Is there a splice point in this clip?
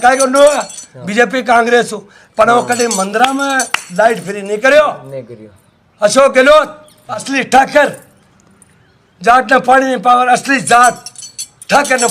yes; 1 cut; at 7.3 s

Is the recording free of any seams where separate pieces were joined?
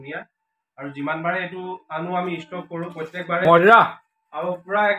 no; 1 cut; at 3.5 s

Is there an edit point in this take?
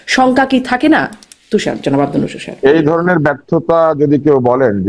no; 0 cuts

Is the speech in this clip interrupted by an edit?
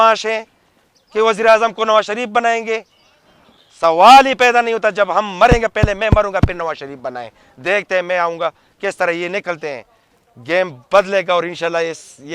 no; 0 cuts

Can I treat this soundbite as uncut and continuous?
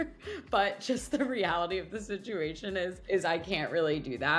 no; 1 cut; at 3.0 s

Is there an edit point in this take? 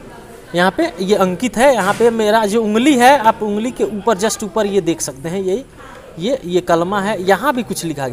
no; 0 cuts

